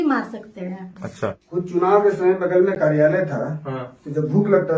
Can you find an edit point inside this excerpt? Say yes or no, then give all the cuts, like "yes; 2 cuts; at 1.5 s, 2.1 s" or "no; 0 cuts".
yes; 1 cut; at 1.4 s